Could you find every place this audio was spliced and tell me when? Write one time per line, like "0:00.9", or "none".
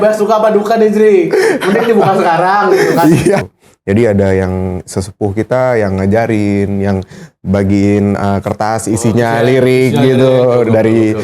0:03.5